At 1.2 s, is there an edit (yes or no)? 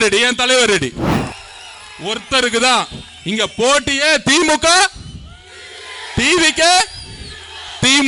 yes